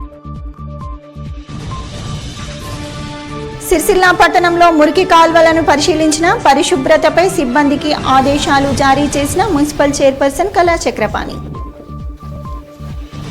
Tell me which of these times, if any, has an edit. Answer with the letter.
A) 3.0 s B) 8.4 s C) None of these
A